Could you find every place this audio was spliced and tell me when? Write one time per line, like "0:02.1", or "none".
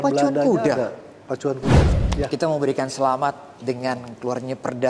0:01.9